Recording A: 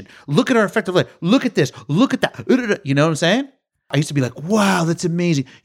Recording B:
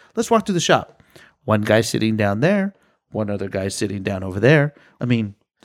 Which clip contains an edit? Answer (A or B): A